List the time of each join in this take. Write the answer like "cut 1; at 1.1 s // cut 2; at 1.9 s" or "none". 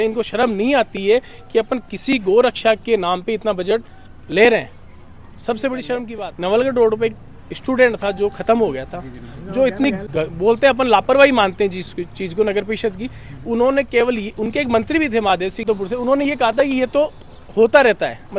cut 1; at 6.2 s // cut 2; at 15.6 s